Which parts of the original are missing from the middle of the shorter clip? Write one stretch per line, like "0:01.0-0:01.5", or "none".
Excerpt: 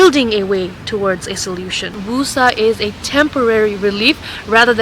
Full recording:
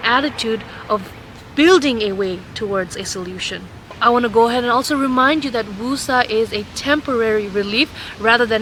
0:03.7-0:05.7